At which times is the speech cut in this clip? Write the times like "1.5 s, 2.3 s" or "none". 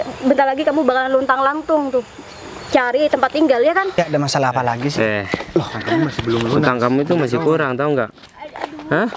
4.0 s